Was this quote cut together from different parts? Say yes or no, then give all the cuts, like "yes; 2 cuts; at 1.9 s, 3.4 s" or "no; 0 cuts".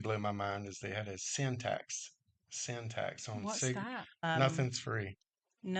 yes; 1 cut; at 4.2 s